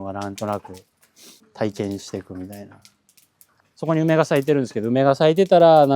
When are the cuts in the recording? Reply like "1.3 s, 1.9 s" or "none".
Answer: 1.4 s, 3.6 s